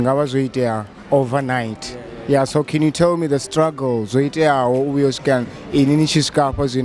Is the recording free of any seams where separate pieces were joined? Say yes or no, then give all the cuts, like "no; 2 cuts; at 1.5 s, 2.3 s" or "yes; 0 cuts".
yes; 0 cuts